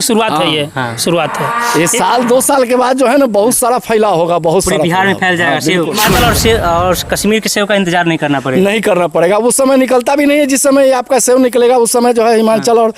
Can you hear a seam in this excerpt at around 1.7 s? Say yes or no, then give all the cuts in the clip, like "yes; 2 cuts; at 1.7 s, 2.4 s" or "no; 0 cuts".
no; 1 cut; at 6.0 s